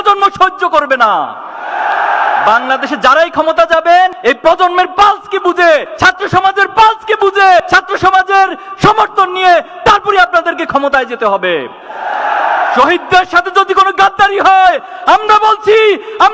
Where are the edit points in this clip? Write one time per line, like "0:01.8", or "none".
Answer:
none